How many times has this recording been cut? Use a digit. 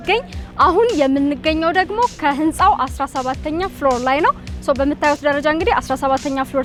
0